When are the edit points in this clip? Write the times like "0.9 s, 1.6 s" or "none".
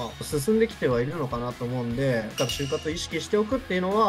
2.3 s